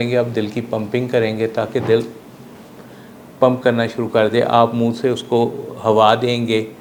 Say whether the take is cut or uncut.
uncut